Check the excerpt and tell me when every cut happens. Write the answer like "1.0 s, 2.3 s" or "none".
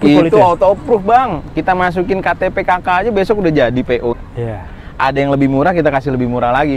4.2 s